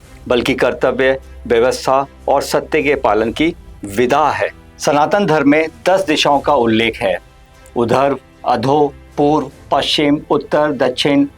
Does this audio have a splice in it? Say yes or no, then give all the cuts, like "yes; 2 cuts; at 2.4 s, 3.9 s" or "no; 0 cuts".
yes; 1 cut; at 4.7 s